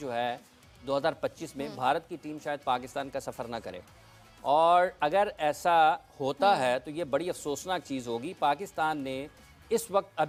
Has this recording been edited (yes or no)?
no